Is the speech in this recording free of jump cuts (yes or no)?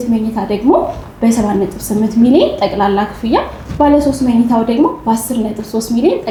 yes